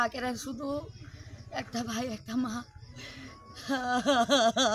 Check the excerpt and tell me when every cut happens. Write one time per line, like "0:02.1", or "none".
none